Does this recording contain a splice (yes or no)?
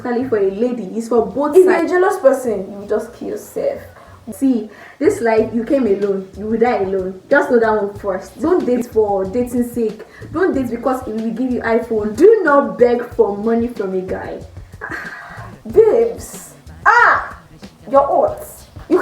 yes